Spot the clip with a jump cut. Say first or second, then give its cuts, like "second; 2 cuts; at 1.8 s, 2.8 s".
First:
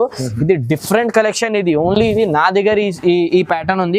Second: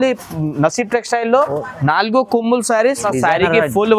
second; 1 cut; at 3.0 s